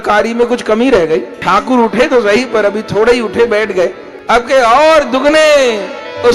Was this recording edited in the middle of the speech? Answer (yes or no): yes